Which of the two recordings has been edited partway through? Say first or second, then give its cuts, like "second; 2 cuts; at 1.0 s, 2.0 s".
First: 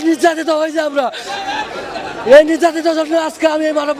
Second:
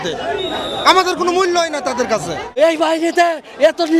second; 1 cut; at 2.6 s